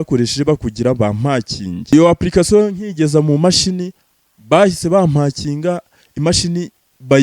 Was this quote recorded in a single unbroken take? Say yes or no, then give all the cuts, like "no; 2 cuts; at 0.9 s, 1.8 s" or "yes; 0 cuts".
no; 1 cut; at 1.9 s